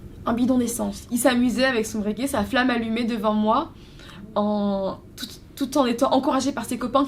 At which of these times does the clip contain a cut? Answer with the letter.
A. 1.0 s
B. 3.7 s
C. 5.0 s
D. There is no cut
A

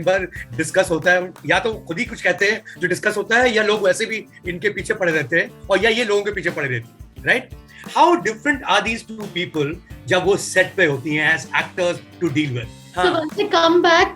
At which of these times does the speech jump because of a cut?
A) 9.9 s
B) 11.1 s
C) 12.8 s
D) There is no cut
C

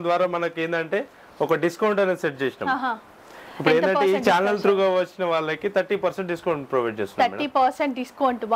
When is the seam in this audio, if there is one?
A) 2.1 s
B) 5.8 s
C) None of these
C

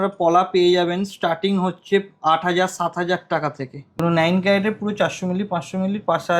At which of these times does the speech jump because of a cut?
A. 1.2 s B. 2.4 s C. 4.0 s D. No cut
C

